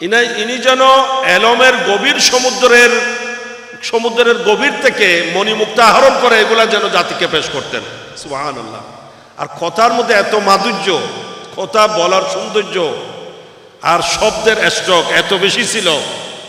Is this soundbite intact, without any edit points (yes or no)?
yes